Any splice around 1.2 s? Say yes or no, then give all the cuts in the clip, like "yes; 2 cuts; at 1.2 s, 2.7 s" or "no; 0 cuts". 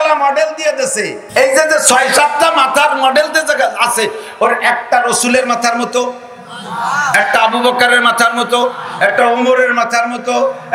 yes; 1 cut; at 1.2 s